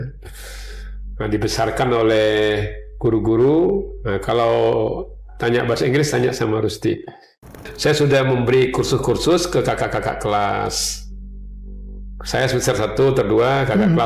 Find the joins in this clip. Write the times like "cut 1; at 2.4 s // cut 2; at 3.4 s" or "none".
cut 1; at 7.7 s